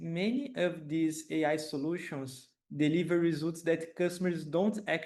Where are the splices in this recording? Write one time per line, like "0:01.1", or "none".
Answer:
none